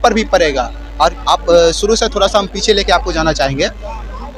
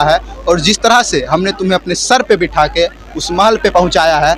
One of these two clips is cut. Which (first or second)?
first